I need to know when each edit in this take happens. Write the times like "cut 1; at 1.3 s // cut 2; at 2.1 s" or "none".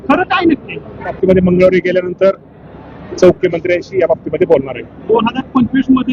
cut 1; at 1.2 s // cut 2; at 3.4 s